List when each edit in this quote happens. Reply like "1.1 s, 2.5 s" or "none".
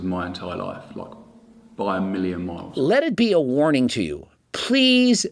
2.7 s